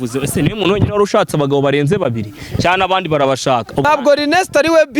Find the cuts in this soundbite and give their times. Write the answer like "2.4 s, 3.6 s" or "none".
3.8 s